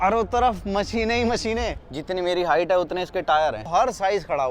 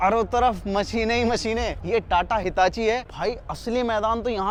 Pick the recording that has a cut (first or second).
first